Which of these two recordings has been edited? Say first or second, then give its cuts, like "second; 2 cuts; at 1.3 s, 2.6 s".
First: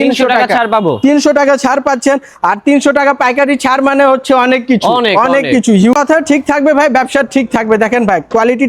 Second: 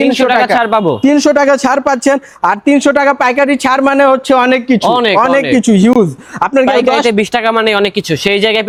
first; 1 cut; at 5.9 s